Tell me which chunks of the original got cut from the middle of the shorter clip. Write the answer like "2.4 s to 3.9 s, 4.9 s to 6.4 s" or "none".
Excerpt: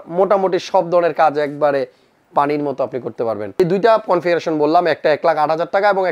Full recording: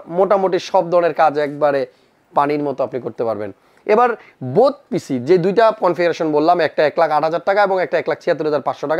3.6 s to 5.3 s